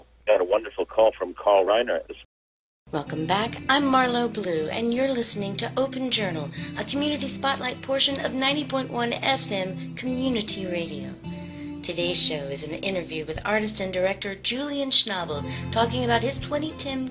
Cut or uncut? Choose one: uncut